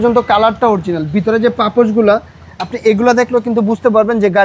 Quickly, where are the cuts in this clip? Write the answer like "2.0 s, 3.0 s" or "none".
none